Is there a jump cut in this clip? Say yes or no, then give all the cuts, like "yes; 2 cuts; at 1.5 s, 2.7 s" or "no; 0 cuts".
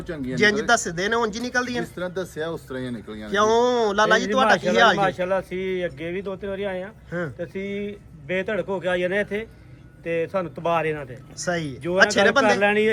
no; 0 cuts